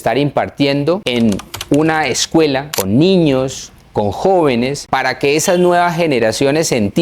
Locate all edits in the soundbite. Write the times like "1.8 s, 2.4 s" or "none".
1.0 s, 2.7 s, 4.8 s